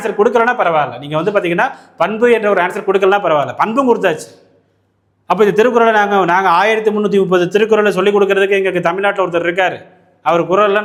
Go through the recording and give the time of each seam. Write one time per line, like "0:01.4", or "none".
none